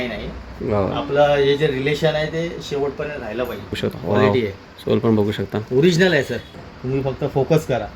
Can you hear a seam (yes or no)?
yes